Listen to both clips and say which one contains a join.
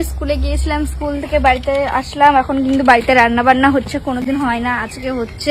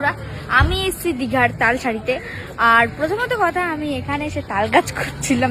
first; 1 cut; at 0.9 s

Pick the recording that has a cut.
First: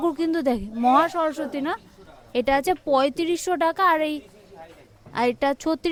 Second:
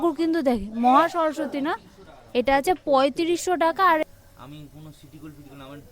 second; 1 cut; at 4.0 s

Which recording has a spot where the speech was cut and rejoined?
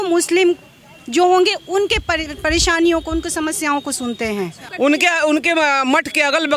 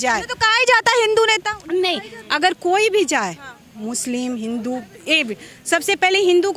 first; 1 cut; at 4.6 s

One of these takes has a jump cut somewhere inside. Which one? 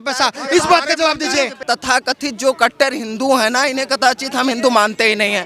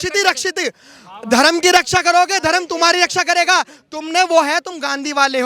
first; 1 cut; at 1.6 s

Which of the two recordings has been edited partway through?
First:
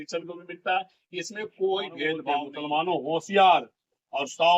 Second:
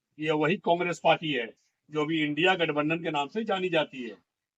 first; 1 cut; at 2.5 s

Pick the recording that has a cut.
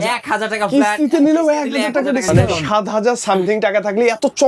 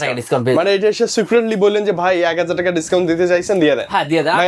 first; 1 cut; at 2.5 s

